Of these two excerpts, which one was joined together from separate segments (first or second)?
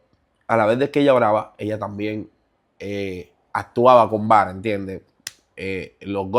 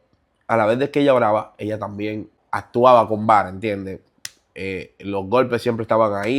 second